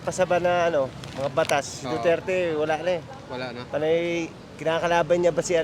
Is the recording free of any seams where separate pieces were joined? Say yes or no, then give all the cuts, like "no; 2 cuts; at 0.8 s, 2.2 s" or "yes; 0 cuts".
yes; 0 cuts